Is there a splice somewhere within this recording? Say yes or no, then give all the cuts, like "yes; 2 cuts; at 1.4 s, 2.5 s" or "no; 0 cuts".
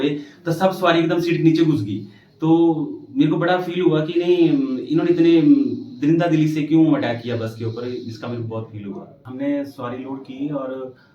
yes; 1 cut; at 9.2 s